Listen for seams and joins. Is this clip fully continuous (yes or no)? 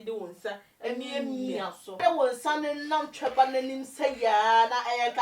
no